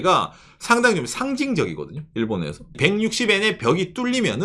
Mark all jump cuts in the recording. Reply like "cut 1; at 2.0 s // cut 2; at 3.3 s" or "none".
cut 1; at 2.7 s